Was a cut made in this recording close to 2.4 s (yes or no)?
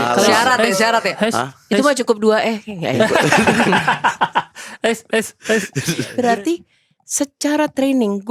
no